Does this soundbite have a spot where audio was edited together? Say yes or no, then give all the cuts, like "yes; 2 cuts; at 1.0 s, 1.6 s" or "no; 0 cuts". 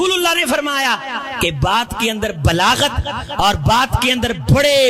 no; 0 cuts